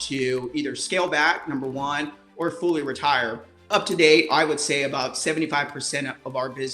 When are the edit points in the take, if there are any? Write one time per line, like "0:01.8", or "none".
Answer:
0:03.5